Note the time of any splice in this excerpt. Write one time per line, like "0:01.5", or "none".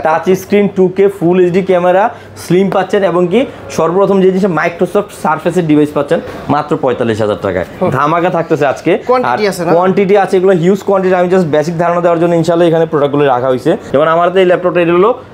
none

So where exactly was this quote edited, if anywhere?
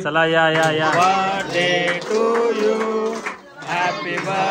0:00.9

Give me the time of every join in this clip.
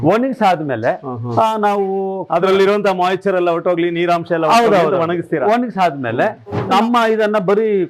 0:06.6

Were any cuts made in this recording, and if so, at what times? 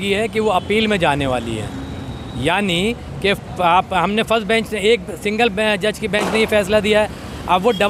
none

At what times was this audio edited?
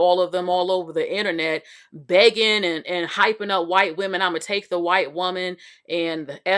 none

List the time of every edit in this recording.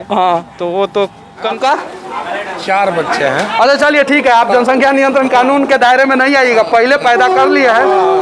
0:01.5

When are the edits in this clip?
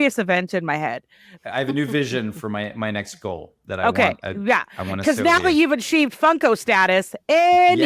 0:01.2

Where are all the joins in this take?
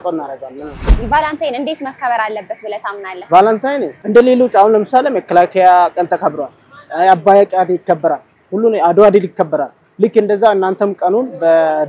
0:00.9
0:04.0

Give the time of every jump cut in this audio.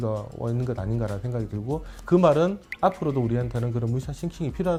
none

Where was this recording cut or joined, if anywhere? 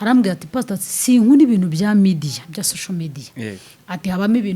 none

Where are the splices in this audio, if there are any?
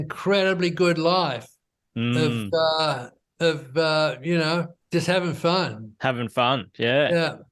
0:04.8

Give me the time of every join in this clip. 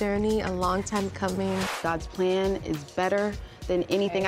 0:01.8

